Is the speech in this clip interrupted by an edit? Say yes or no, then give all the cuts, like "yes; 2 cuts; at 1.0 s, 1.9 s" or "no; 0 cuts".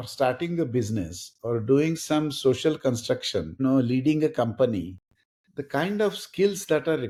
no; 0 cuts